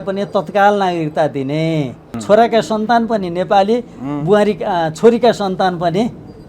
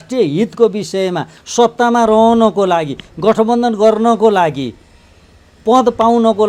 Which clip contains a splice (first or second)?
first